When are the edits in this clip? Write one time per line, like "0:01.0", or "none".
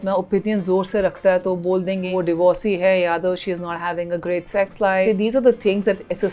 0:02.1
0:05.0